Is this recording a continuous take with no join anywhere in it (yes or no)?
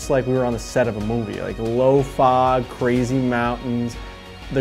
no